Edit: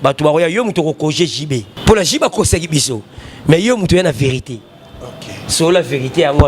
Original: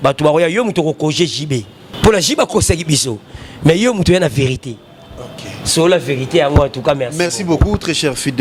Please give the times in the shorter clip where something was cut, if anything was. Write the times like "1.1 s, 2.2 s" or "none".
1.7 s